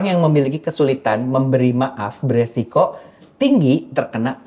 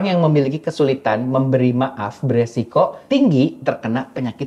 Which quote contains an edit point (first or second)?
second